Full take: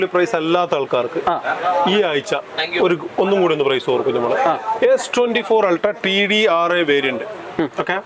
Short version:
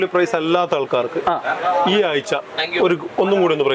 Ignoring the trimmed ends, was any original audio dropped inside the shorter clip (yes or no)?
no